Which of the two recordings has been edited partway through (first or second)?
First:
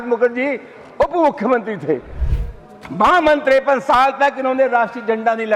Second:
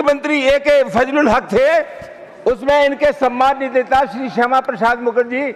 first